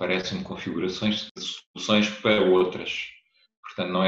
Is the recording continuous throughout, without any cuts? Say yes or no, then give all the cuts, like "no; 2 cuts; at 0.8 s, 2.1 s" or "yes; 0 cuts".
no; 1 cut; at 1.2 s